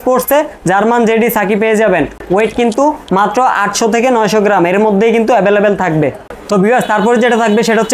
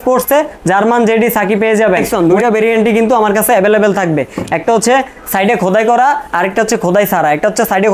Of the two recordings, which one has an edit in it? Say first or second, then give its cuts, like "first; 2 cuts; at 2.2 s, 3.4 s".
second; 1 cut; at 2.1 s